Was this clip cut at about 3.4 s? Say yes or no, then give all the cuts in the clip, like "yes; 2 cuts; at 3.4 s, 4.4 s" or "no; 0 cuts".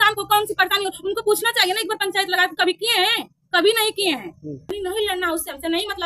no; 1 cut; at 4.7 s